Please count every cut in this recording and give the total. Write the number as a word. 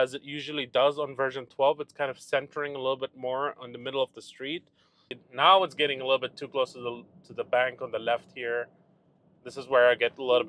one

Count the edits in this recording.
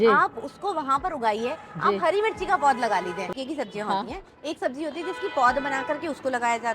one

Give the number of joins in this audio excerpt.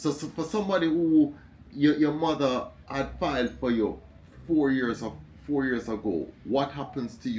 zero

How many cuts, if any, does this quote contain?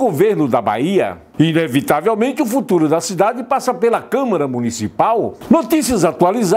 two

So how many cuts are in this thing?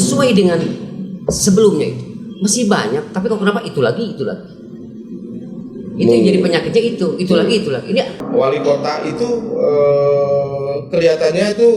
one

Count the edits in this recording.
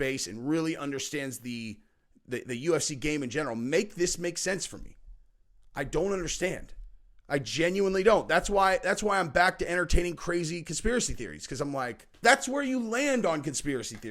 one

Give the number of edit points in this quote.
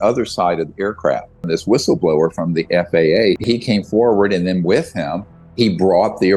two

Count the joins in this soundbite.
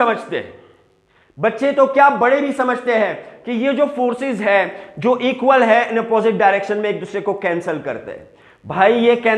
zero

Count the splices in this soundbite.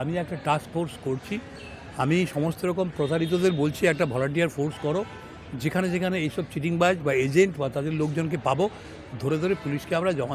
zero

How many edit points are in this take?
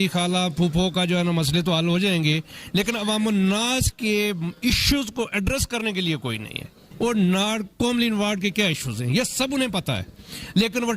one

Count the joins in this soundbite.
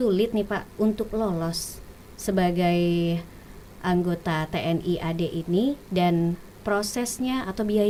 zero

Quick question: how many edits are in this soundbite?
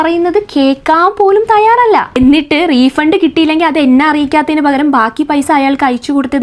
one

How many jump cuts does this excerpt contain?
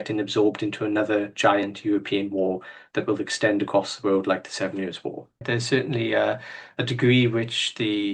one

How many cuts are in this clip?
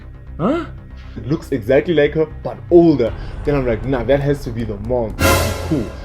one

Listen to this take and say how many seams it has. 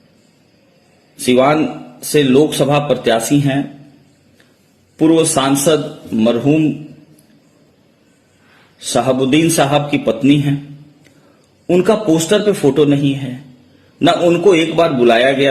zero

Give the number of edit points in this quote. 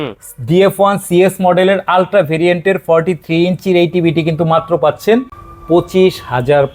zero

